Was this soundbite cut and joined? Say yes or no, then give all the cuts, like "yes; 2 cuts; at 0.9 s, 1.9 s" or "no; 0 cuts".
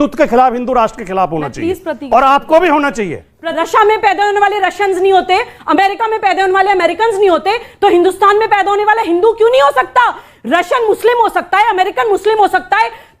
yes; 1 cut; at 3.5 s